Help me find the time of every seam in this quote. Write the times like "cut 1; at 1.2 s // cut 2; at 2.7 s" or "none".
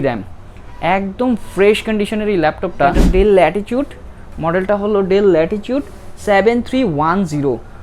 cut 1; at 3.0 s